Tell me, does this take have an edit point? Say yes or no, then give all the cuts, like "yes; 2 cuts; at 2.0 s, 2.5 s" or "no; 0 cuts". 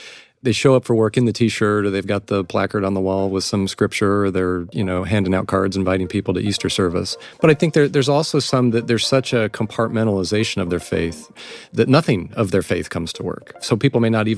yes; 2 cuts; at 7.1 s, 11.3 s